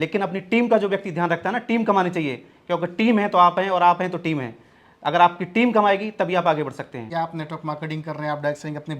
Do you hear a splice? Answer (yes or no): yes